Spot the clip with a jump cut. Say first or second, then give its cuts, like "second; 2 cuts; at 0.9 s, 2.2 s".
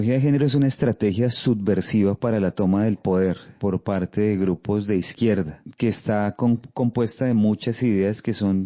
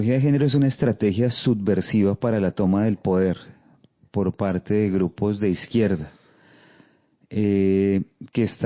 first; 2 cuts; at 3.5 s, 5.6 s